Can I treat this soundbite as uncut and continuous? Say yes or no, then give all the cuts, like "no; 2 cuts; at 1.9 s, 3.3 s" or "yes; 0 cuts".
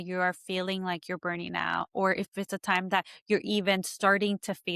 yes; 0 cuts